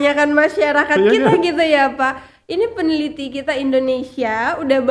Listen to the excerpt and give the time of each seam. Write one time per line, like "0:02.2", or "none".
none